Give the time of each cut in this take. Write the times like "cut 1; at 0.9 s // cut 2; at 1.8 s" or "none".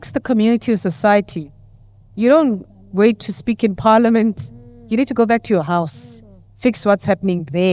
none